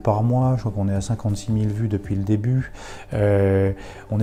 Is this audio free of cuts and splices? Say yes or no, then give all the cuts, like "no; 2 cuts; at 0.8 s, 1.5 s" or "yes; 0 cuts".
yes; 0 cuts